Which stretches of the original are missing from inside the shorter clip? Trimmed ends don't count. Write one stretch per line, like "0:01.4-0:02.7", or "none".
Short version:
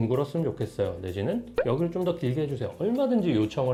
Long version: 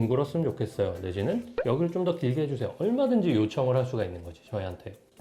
none